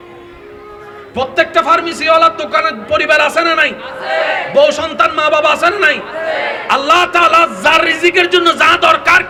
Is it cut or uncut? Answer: uncut